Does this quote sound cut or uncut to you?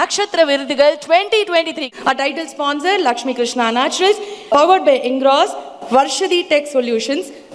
cut